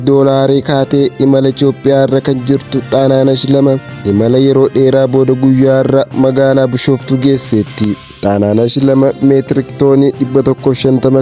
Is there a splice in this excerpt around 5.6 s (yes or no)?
no